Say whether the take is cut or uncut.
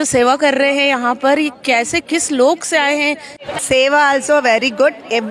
cut